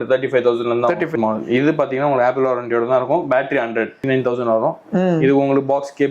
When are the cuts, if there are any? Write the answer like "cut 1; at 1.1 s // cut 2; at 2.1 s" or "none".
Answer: cut 1; at 1.0 s // cut 2; at 4.0 s